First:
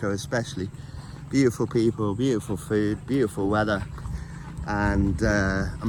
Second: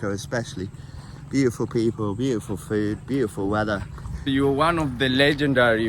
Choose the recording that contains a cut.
second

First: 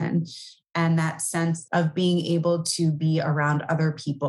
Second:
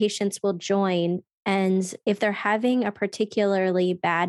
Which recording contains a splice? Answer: first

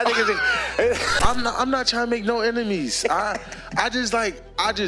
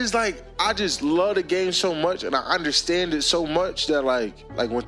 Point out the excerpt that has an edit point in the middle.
first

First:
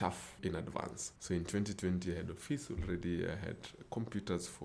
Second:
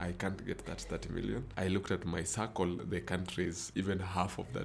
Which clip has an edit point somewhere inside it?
second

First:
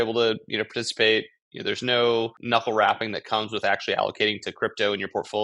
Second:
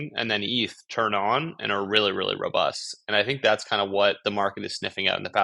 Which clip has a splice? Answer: first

